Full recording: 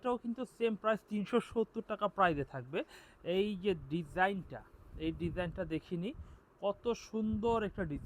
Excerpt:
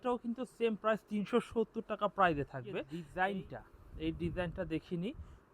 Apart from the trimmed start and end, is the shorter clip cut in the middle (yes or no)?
yes